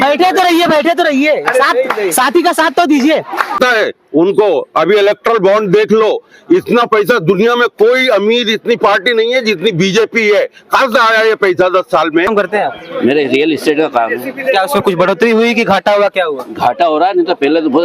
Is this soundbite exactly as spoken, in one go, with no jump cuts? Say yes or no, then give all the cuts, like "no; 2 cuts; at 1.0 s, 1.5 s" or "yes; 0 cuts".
no; 2 cuts; at 3.5 s, 12.3 s